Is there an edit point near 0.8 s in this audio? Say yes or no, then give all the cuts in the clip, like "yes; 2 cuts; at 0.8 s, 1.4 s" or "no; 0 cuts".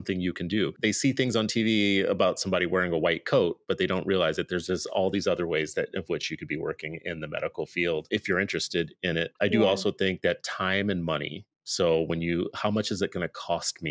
yes; 3 cuts; at 0.8 s, 8.1 s, 9.3 s